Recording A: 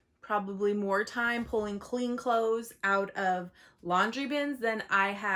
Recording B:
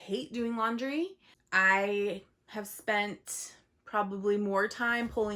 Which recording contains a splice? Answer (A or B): B